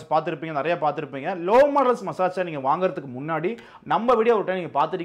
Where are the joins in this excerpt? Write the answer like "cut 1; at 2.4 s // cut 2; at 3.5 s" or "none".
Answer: none